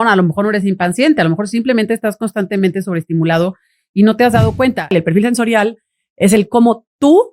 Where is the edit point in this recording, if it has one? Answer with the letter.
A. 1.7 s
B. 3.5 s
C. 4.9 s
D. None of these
C